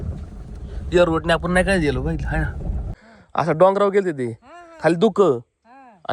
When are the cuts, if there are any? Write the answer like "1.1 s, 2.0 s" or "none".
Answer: 3.2 s